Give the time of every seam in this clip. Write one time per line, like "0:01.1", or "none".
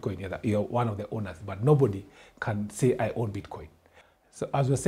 none